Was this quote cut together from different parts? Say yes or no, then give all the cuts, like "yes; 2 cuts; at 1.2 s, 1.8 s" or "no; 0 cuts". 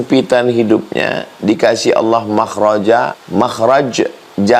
yes; 1 cut; at 3.2 s